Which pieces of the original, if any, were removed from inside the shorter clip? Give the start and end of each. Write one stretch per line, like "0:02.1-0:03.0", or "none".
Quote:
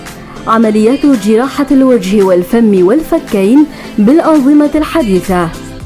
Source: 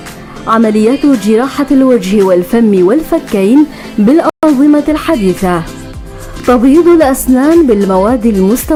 0:04.3-0:04.4